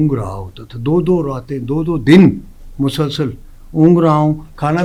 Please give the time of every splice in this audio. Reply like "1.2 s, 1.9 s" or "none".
none